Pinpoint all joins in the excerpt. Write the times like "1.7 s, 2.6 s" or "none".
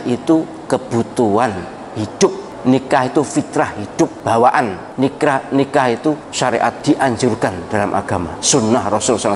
2.5 s, 4.2 s, 4.8 s, 6.7 s, 8.4 s